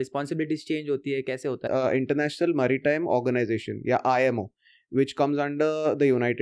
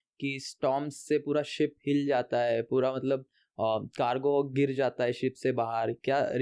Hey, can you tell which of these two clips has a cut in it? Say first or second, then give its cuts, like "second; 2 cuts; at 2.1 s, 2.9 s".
first; 1 cut; at 1.6 s